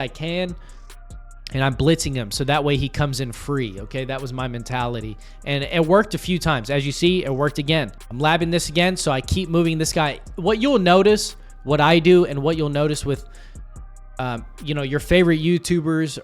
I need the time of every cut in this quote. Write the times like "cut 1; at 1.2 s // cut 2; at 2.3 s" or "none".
cut 1; at 8.0 s